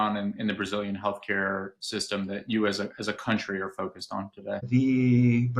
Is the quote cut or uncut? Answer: cut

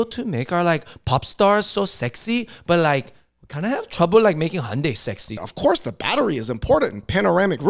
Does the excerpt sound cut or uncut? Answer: cut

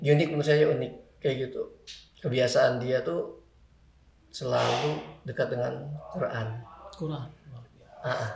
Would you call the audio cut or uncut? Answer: uncut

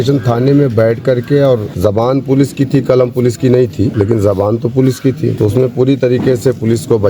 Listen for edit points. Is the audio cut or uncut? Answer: cut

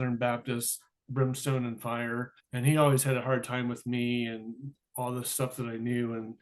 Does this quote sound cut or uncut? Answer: cut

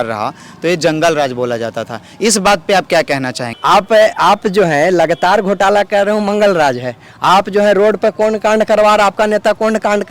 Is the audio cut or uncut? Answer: cut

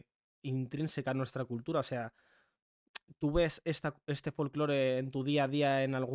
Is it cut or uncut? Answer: uncut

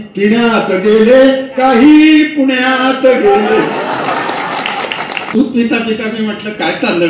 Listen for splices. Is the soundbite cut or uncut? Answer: cut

